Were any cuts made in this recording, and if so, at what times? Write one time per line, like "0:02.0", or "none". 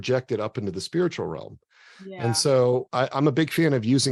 0:02.9